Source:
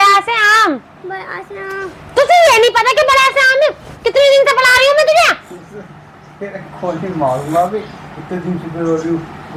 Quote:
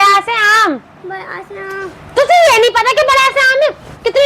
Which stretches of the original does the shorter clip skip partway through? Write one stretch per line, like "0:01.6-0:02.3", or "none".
none